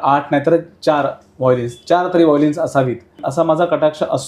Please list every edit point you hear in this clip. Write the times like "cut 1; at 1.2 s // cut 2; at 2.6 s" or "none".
cut 1; at 3.2 s